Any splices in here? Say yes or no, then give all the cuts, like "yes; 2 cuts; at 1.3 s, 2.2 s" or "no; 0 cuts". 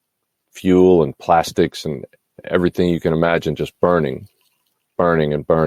no; 0 cuts